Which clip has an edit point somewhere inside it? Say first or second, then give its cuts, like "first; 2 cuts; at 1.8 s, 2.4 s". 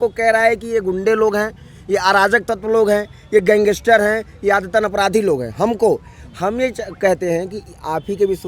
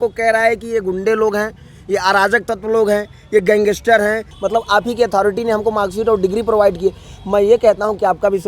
second; 1 cut; at 4.3 s